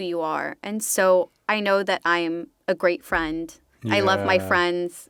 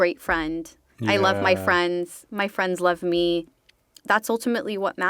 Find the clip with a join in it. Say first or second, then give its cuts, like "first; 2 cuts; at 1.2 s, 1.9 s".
second; 1 cut; at 3.5 s